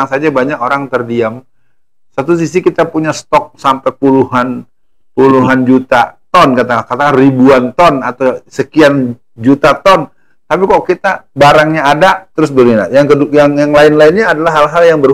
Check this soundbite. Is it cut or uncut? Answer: uncut